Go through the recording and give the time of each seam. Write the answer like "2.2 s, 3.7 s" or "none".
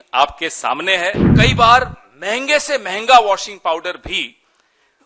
1.3 s